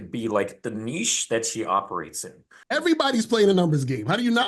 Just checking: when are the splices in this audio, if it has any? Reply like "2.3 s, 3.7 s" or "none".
2.6 s